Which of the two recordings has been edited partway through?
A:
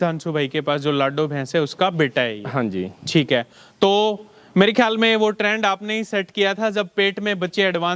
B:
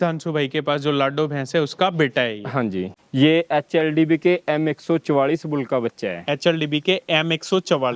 B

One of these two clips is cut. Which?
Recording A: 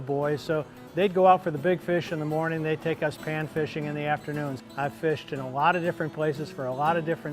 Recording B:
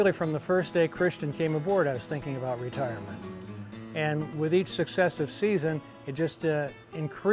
A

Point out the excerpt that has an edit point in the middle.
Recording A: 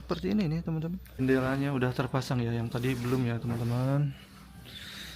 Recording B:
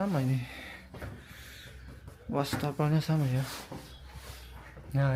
A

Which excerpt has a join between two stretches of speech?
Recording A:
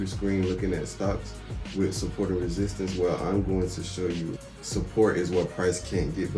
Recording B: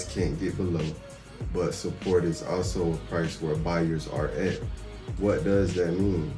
A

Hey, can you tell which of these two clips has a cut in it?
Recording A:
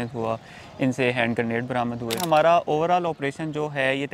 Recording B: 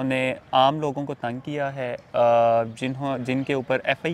A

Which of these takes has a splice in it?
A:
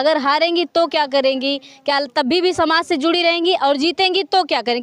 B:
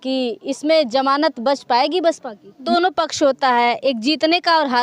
B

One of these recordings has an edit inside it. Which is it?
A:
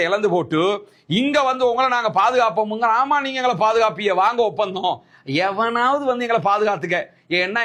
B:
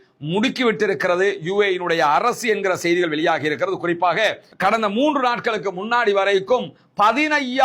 B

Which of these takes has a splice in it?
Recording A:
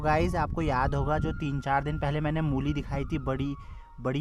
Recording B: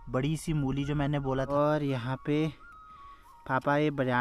B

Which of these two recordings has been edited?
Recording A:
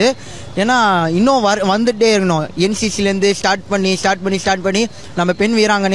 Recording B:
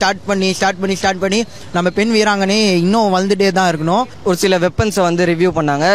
B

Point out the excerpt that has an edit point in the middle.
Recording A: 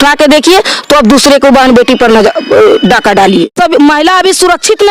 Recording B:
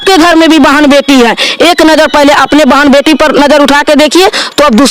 A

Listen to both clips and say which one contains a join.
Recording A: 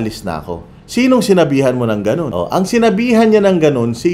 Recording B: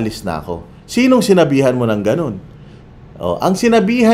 A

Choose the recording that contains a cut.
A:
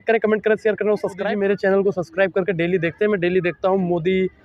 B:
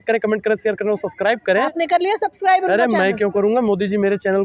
A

